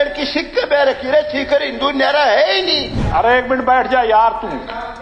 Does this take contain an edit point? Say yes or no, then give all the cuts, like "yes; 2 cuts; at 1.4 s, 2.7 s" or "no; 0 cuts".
yes; 1 cut; at 3.0 s